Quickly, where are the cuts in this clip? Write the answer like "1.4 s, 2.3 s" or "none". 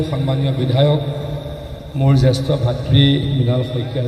none

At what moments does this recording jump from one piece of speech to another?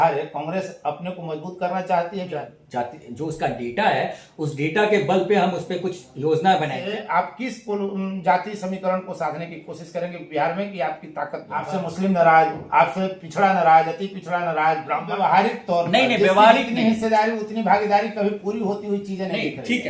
2.4 s, 6.8 s, 11.7 s, 15.1 s

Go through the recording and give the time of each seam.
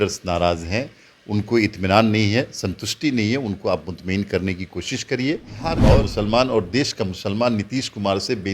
5.8 s

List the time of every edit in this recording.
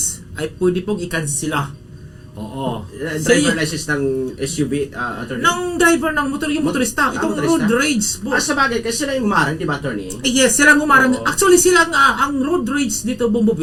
none

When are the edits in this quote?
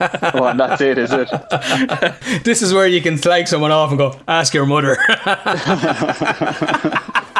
2.2 s

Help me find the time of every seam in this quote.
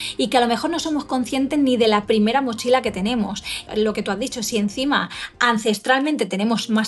3.6 s

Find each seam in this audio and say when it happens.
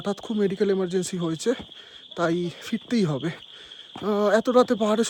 none

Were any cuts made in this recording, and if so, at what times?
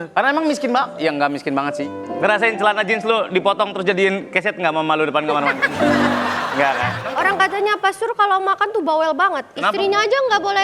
1.8 s, 7.0 s

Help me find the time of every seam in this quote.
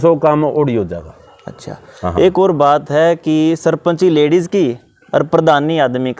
none

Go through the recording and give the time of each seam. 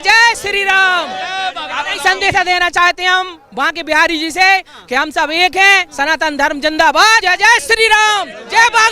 7.2 s

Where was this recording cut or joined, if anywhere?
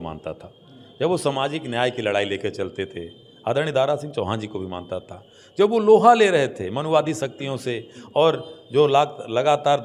none

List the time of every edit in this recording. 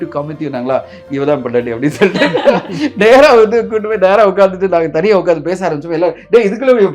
none

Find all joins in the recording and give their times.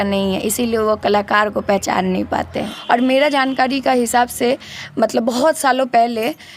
2.7 s

